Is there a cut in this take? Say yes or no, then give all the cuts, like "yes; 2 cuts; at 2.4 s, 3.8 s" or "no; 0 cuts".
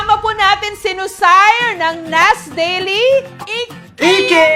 no; 0 cuts